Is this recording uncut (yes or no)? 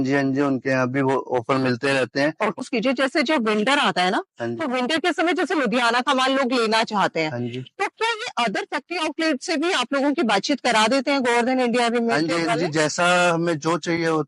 no